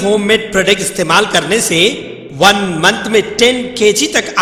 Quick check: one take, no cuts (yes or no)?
yes